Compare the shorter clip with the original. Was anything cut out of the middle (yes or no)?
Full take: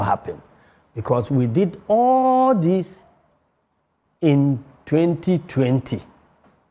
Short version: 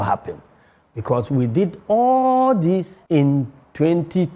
yes